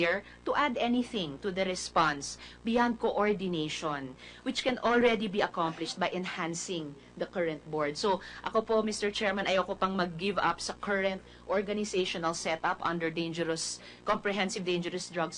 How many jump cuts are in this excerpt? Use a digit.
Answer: 1